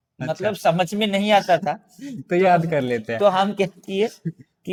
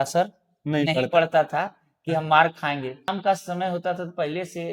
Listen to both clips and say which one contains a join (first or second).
second